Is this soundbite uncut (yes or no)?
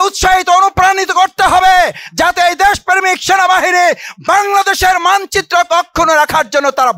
yes